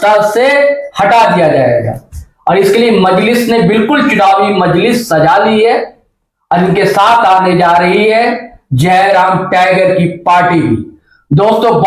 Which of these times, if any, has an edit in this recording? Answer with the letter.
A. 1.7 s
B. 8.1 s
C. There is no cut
C